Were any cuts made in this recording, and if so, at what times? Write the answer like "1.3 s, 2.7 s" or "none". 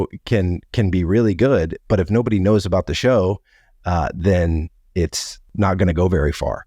5.5 s